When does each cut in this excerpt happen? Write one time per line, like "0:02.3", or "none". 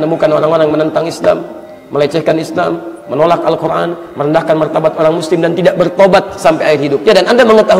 none